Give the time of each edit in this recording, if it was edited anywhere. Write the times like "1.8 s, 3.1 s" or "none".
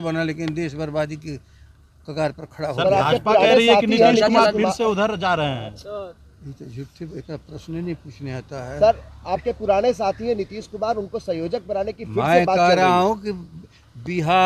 none